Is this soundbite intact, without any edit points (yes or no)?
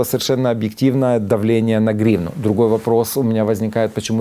yes